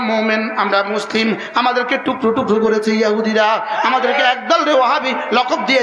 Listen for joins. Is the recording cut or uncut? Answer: uncut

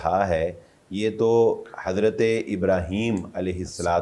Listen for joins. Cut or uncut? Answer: uncut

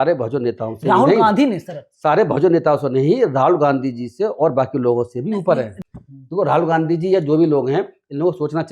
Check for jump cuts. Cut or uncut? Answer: cut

